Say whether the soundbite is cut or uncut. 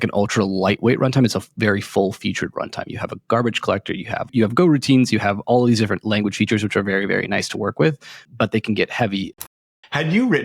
cut